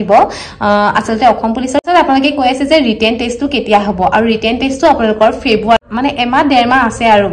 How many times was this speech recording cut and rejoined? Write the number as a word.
two